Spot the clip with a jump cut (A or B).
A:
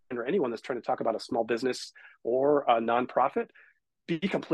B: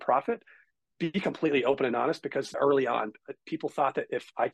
B